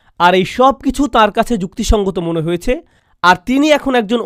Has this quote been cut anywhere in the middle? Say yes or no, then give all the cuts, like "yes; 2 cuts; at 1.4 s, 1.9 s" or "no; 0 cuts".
no; 0 cuts